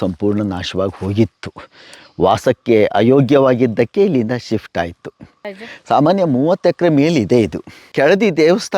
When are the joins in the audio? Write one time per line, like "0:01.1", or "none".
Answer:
0:05.6
0:07.9

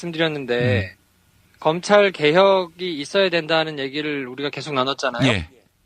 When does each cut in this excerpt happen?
0:03.7

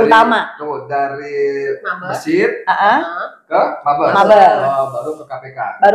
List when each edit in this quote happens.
none

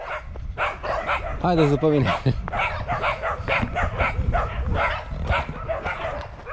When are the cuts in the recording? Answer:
none

